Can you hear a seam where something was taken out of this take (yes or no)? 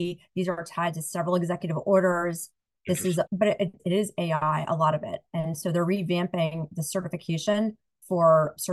no